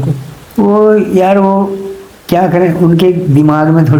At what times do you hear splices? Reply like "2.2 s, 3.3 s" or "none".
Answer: none